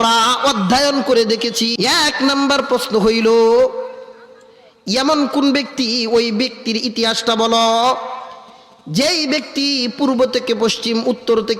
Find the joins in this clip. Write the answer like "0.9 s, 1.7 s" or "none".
1.7 s